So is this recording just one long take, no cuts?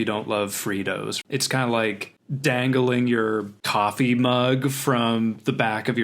no; 1 cut; at 1.2 s

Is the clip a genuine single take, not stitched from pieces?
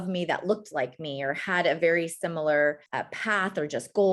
no; 1 cut; at 2.9 s

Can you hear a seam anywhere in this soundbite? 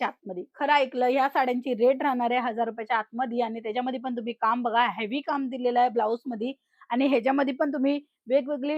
no; 0 cuts

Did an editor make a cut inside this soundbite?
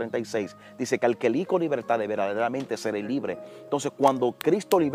no; 0 cuts

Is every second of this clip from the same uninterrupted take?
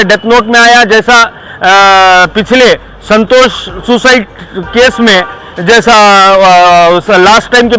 yes; 0 cuts

